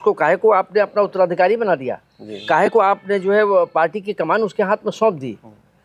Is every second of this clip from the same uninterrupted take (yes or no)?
yes